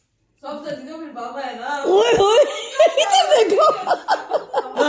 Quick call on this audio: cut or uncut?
uncut